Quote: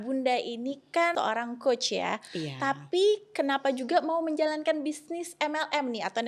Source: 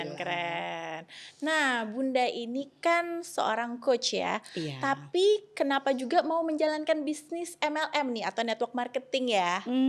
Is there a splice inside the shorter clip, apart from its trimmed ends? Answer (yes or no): yes